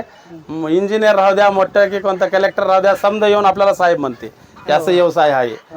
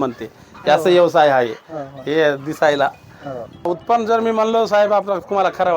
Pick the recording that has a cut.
second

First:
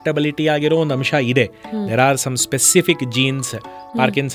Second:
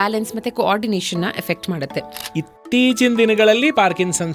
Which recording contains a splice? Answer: second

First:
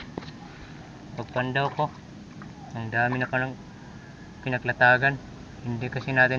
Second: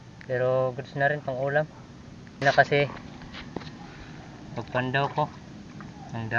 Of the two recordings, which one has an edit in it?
second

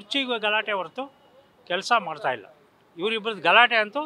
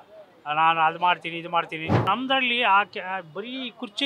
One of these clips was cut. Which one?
second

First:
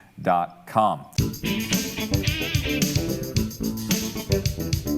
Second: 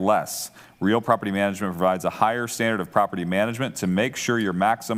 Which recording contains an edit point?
first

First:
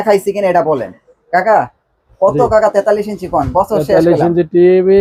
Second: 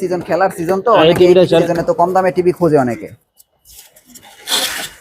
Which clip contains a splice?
second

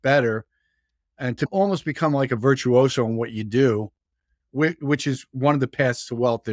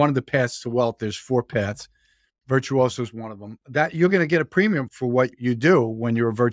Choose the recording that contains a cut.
first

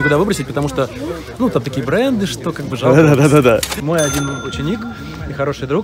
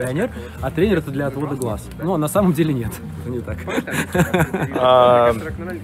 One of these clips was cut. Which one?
first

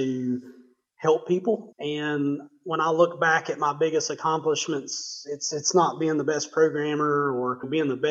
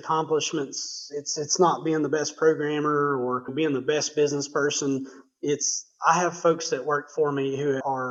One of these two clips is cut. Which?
first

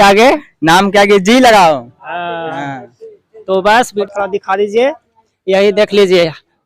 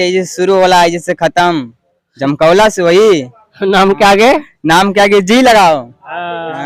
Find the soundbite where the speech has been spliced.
first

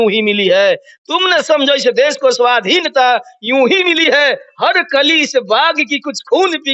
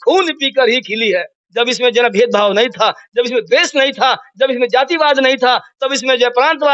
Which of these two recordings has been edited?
second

